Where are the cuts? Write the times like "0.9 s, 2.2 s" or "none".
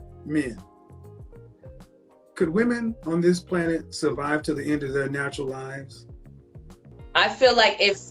6.9 s